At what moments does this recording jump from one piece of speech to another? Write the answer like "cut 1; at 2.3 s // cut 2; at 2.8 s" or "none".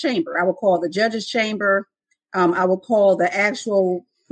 none